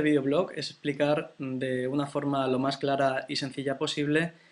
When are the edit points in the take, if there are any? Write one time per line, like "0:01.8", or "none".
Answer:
0:01.1